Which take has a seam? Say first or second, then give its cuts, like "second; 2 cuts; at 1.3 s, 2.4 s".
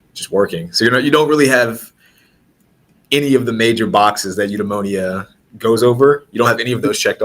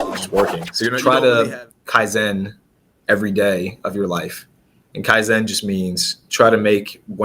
second; 1 cut; at 1.0 s